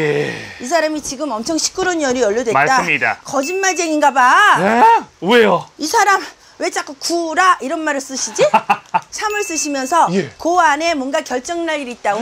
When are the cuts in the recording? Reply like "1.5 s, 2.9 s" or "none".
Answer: 3.2 s, 9.1 s